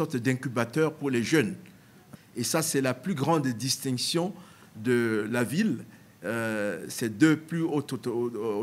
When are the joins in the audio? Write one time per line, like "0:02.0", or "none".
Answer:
0:02.1